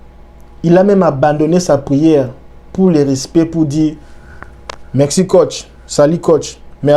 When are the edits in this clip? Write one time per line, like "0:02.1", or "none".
none